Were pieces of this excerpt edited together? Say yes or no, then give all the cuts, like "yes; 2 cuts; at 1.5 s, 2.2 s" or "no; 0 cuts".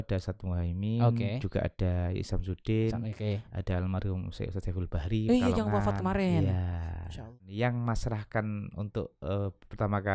yes; 1 cut; at 7.3 s